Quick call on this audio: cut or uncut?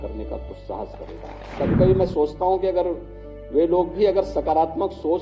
cut